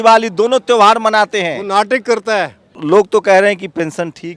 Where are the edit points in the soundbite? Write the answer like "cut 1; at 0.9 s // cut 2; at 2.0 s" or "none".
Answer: cut 1; at 2.7 s